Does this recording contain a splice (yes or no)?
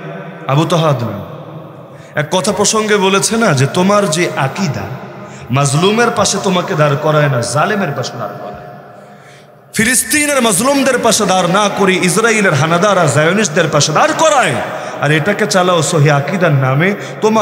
no